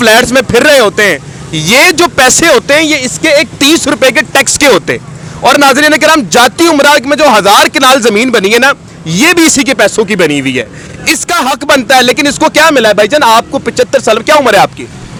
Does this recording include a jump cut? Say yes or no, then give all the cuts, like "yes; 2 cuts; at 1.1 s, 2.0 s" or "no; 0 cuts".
no; 0 cuts